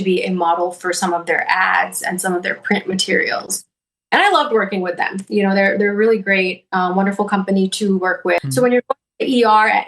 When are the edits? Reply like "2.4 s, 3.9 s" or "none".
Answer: 8.4 s

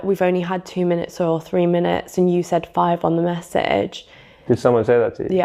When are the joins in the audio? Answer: none

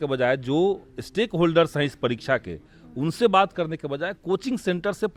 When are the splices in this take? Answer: none

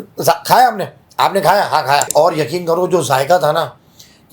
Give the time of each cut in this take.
2.1 s

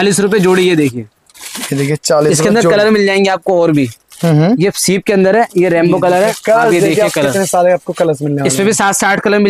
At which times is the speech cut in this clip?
none

